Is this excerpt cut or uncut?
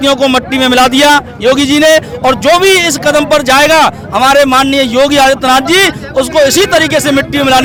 uncut